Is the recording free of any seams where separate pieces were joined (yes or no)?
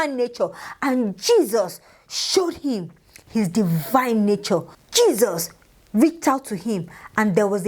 yes